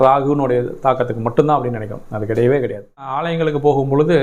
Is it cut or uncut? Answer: cut